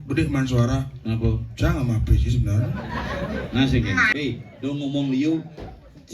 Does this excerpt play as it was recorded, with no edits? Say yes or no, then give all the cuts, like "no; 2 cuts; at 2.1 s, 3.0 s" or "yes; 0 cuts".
no; 1 cut; at 4.1 s